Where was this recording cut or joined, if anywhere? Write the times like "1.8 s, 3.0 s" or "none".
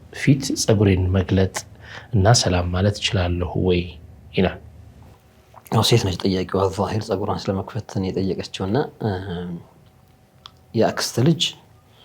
none